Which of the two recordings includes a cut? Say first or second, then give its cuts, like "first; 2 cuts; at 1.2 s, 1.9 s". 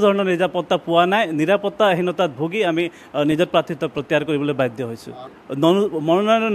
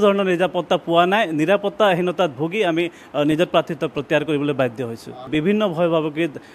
second; 1 cut; at 5.3 s